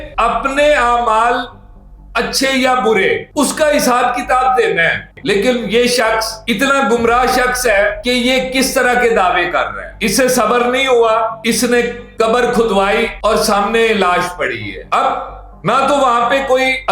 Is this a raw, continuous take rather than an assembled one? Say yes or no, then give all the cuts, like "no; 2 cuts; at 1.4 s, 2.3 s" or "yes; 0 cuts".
no; 1 cut; at 5.1 s